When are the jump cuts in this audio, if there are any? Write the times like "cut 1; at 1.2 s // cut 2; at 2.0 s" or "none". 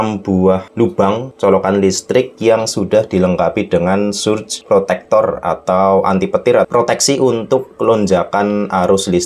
cut 1; at 0.9 s // cut 2; at 4.5 s // cut 3; at 6.7 s